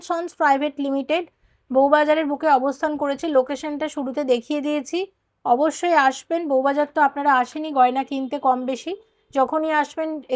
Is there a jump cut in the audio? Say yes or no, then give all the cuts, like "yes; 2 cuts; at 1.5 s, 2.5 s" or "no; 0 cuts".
no; 0 cuts